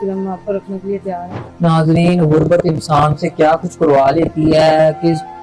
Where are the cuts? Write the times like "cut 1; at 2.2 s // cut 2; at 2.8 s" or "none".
cut 1; at 1.3 s